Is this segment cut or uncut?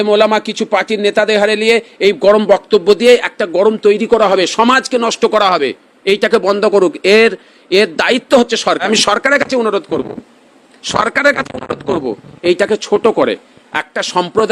cut